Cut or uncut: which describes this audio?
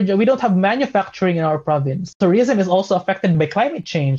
cut